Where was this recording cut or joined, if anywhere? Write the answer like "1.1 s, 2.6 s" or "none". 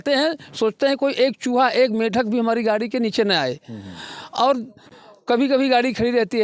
none